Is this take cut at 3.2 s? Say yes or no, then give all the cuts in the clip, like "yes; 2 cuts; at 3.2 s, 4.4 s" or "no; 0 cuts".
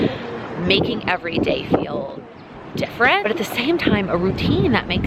yes; 1 cut; at 3.2 s